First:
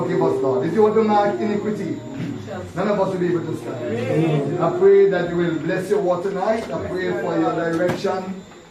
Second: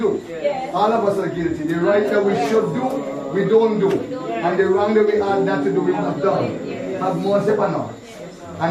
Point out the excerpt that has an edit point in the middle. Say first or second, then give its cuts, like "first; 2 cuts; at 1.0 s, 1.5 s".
second; 1 cut; at 7.4 s